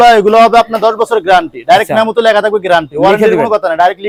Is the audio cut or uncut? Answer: uncut